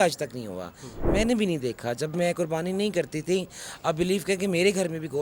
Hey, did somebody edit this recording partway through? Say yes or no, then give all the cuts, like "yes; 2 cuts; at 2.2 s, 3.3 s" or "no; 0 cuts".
no; 0 cuts